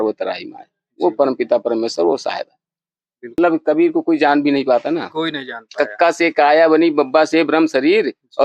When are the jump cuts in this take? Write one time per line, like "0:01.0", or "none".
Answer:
0:03.3